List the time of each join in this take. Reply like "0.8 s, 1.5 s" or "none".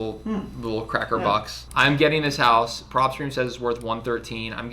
1.6 s